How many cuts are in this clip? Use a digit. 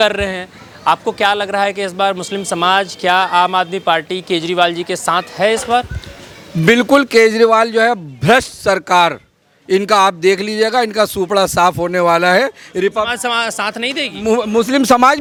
0